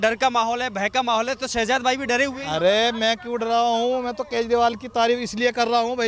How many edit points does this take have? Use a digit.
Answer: 0